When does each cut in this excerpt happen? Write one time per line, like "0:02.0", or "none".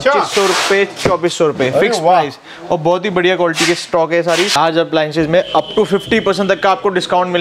0:04.5